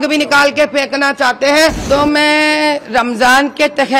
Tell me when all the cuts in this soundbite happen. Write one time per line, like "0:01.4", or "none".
0:01.8